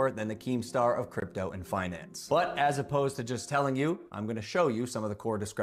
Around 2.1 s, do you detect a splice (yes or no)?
no